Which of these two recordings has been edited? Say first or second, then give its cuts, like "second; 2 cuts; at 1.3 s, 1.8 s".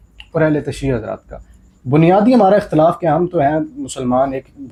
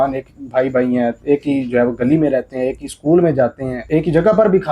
second; 1 cut; at 3.7 s